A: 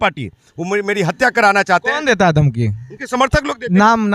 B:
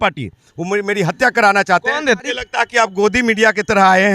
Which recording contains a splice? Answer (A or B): B